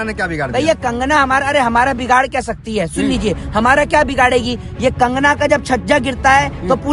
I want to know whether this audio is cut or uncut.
uncut